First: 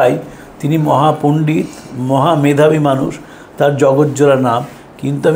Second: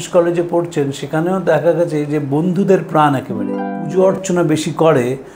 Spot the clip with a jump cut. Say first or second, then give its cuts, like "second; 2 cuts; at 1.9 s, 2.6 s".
second; 1 cut; at 3.8 s